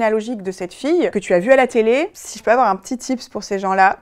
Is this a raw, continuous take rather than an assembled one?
no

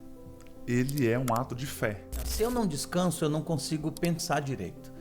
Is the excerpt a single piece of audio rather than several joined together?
no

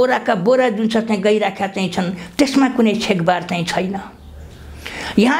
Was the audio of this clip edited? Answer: no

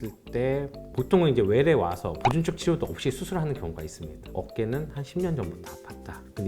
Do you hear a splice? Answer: yes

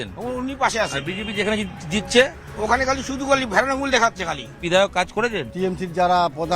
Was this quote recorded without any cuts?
no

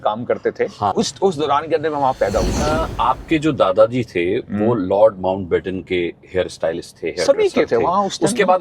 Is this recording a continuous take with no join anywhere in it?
no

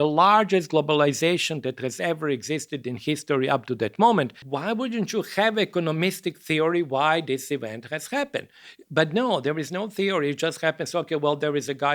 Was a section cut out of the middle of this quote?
yes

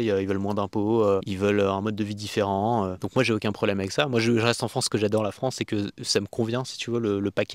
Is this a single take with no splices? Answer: yes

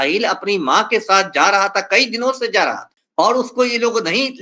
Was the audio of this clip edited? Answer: yes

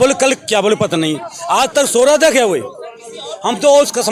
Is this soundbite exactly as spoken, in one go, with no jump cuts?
yes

